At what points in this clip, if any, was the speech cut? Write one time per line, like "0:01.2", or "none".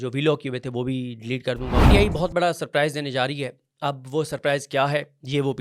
0:01.8